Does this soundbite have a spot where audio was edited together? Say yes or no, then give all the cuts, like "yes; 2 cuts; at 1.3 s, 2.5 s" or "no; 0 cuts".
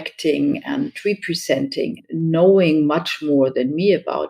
no; 0 cuts